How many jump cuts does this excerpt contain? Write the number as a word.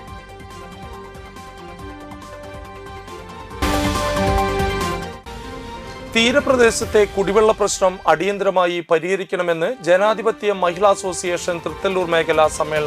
one